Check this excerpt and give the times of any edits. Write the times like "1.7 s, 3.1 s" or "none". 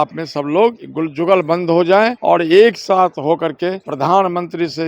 0.9 s, 2.2 s, 3.9 s